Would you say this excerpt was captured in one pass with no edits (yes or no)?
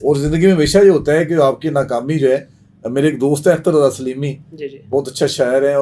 yes